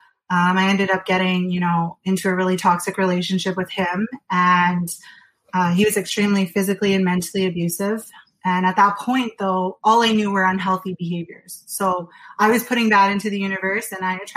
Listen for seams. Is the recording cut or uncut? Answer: uncut